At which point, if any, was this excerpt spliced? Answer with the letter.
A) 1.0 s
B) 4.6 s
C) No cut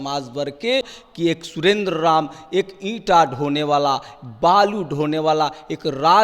A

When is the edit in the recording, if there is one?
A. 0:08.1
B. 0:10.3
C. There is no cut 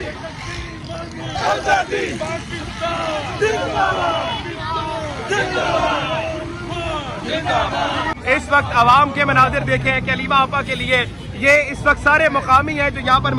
A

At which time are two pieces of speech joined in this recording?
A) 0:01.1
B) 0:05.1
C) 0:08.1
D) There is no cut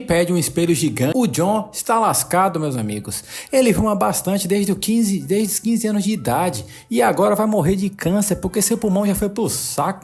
A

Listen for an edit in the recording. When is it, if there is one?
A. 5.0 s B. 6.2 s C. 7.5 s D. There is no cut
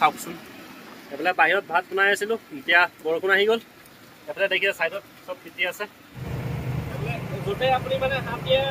B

